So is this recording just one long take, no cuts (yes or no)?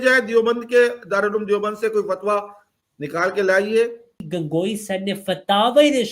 no